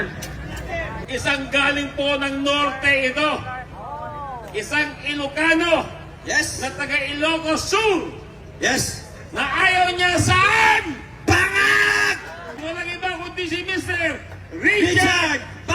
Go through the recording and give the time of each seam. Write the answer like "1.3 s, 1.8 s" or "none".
1.1 s, 12.6 s